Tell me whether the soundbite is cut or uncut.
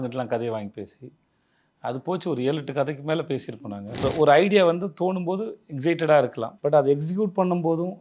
cut